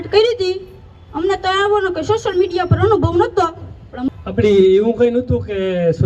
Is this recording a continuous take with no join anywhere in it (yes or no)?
no